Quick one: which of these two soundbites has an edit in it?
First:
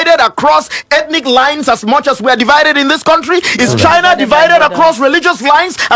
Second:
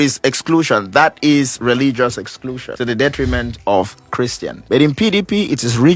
second; 2 cuts; at 2.6 s, 4.5 s

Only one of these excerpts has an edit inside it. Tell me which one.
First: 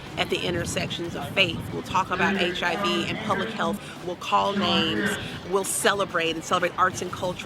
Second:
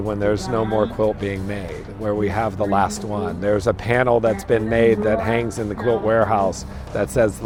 first; 1 cut; at 4.0 s

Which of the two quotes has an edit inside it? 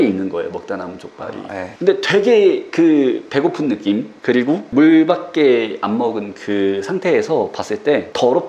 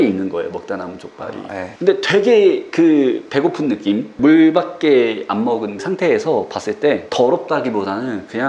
second; 2 cuts; at 4.1 s, 5.8 s

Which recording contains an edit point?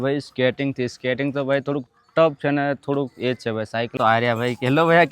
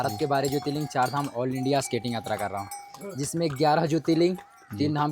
first; 1 cut; at 3.9 s

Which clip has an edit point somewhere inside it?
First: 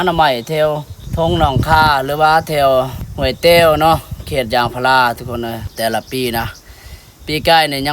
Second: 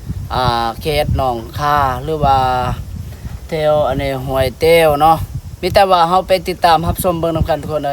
first; 3 cuts; at 1.0 s, 3.0 s, 5.7 s

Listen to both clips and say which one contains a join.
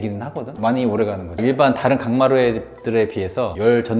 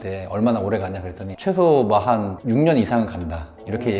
first; 1 cut; at 1.4 s

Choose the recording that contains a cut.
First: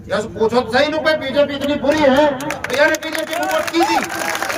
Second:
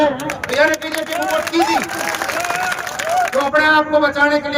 second; 1 cut; at 3.3 s

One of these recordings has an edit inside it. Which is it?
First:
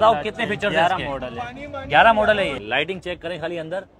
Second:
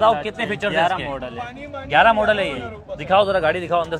first; 1 cut; at 2.6 s

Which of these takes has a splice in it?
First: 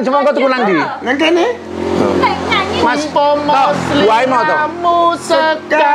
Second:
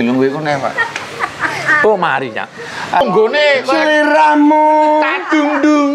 second; 1 cut; at 3.0 s

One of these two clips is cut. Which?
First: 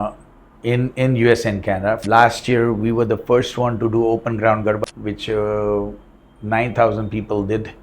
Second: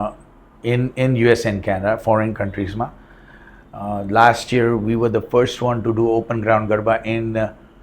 first; 2 cuts; at 2.0 s, 4.8 s

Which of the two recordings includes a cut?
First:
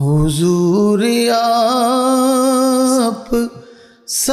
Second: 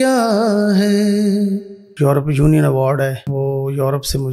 second; 2 cuts; at 1.9 s, 3.3 s

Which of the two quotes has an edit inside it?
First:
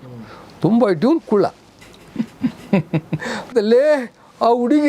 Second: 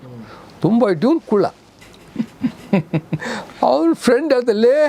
first; 1 cut; at 3.5 s

